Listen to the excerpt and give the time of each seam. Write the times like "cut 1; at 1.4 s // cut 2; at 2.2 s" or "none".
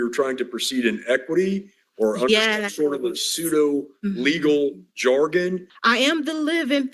cut 1; at 5.7 s